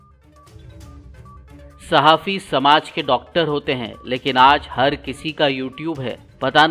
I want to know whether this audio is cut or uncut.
cut